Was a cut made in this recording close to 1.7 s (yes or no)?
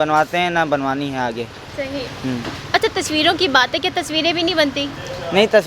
no